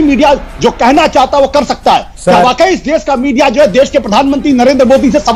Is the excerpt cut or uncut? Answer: uncut